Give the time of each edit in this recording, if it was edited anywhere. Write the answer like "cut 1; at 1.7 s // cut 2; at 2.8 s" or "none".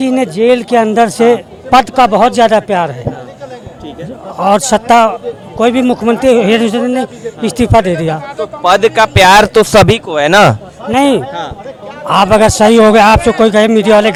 none

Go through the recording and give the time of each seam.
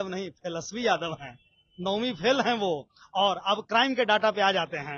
none

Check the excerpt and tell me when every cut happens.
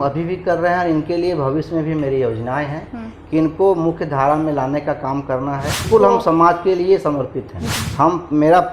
cut 1; at 5.9 s // cut 2; at 7.6 s

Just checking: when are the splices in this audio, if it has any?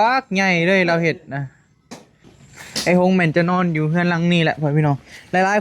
cut 1; at 2.3 s

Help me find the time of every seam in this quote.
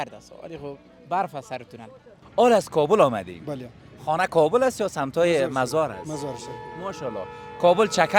cut 1; at 2.1 s

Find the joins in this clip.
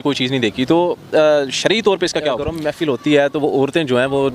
cut 1; at 2.6 s

